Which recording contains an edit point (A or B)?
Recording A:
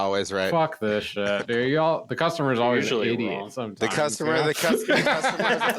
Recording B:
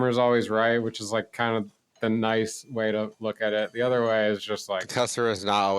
B